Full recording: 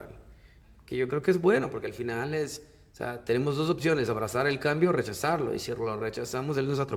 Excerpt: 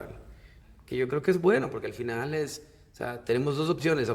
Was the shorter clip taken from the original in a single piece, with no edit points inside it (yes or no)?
yes